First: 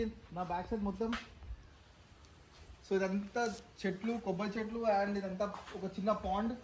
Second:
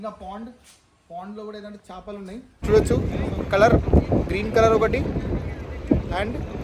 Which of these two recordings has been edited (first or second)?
second